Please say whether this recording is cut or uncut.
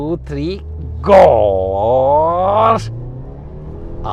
uncut